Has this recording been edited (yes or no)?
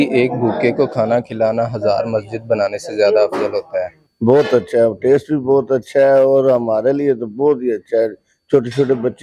no